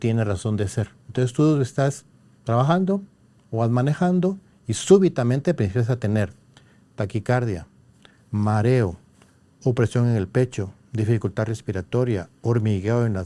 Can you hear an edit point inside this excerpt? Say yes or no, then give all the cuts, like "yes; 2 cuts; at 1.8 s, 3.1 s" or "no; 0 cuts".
no; 0 cuts